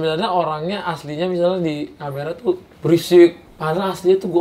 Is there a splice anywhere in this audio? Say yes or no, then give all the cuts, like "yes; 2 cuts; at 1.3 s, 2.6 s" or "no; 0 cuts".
yes; 2 cuts; at 2.7 s, 3.5 s